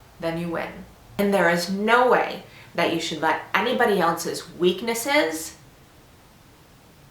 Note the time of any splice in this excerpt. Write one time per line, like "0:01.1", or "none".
0:01.0